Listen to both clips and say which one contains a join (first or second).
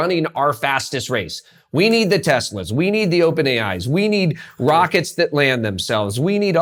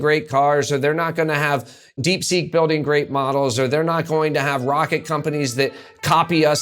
second